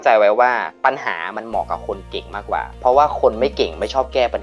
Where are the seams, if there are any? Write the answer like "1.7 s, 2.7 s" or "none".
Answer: none